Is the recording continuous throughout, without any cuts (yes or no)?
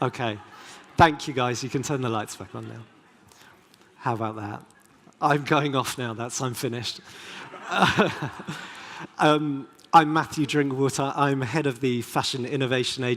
yes